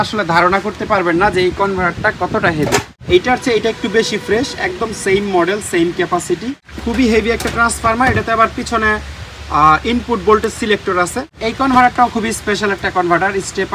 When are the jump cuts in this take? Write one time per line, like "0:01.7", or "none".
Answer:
0:02.9
0:06.7
0:11.3